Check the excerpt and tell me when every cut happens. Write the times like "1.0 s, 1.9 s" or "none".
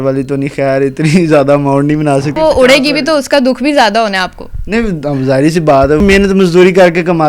2.3 s, 6.0 s